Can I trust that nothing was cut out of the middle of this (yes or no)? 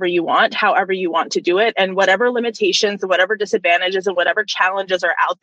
yes